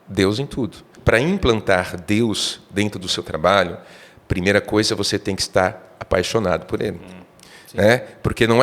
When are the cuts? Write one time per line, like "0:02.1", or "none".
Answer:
0:00.9